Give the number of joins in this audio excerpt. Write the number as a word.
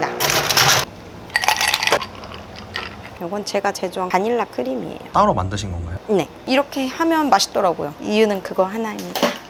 zero